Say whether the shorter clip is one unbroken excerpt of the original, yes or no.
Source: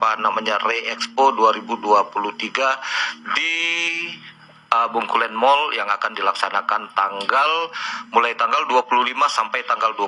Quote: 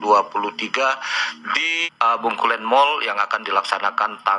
no